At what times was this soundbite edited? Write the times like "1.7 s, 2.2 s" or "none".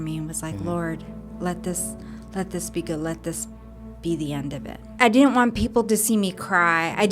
4.9 s